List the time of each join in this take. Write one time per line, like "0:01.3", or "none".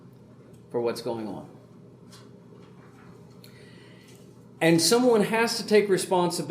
none